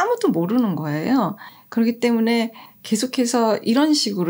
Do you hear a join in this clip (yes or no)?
no